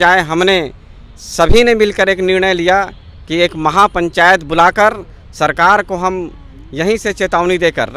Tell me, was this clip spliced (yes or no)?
no